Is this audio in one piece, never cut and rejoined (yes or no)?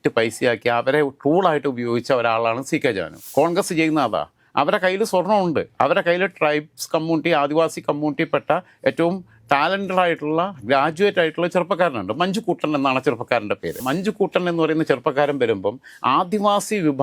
no